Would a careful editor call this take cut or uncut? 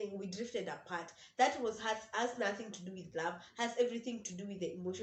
uncut